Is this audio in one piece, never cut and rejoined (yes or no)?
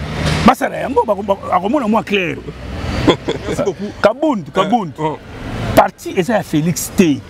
no